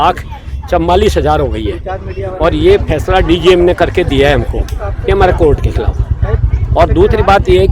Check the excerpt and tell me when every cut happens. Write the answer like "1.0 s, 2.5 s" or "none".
none